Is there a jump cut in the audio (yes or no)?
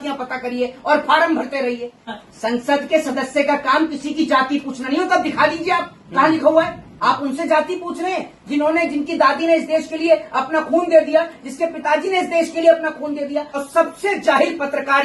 yes